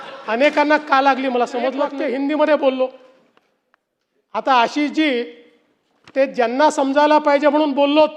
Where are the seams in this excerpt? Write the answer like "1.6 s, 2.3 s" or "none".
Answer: 1.9 s